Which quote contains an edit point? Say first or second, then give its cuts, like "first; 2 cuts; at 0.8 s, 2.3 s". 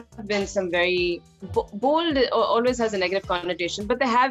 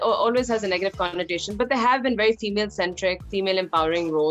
first; 1 cut; at 1.3 s